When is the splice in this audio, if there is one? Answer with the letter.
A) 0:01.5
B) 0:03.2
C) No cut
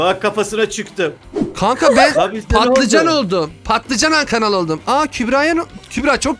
A